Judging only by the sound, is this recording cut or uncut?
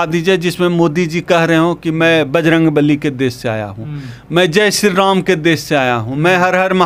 uncut